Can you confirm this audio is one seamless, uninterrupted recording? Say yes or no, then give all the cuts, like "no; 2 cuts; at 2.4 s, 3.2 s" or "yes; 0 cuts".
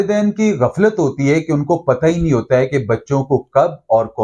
yes; 0 cuts